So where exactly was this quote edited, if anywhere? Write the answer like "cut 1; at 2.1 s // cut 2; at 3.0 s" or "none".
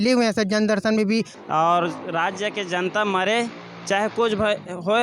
cut 1; at 1.3 s